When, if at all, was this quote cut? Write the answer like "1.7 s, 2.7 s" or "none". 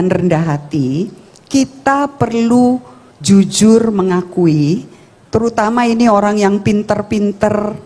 none